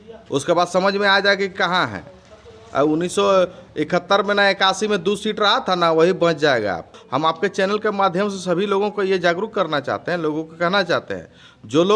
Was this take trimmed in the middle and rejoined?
yes; 1 cut; at 7.0 s

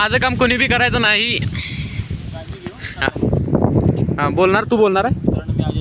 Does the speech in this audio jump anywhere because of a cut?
no; 0 cuts

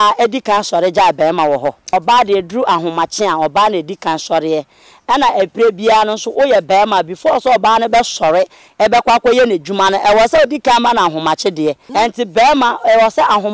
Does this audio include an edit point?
yes; 2 cuts; at 1.8 s, 11.8 s

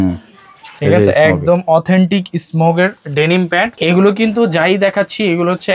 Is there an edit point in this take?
yes; 1 cut; at 3.7 s

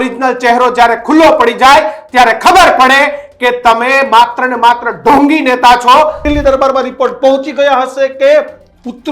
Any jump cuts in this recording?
yes; 1 cut; at 6.2 s

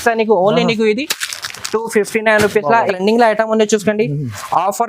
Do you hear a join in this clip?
yes; 1 cut; at 2.9 s

